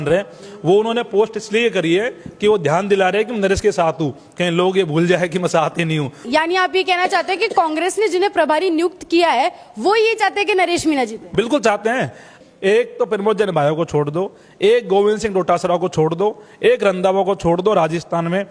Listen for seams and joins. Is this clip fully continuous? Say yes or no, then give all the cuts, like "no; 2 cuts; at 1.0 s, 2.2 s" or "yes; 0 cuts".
no; 2 cuts; at 6.2 s, 12.3 s